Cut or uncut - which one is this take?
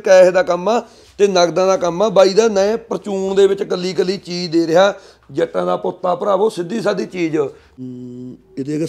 cut